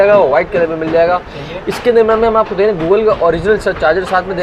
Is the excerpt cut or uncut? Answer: uncut